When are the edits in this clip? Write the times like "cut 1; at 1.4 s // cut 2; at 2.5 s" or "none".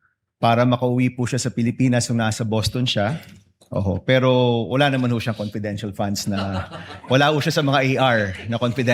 none